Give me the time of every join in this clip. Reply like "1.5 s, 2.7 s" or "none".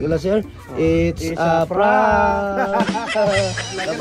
none